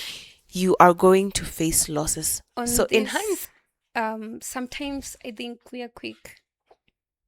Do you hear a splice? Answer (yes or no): yes